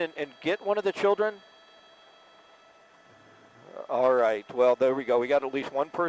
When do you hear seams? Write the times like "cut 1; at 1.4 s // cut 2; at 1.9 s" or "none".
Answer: none